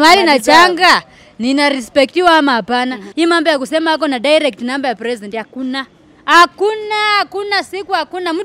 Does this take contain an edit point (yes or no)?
yes